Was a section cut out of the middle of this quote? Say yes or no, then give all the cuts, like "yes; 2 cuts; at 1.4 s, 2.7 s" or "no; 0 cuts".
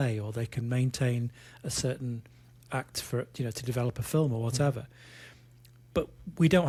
no; 0 cuts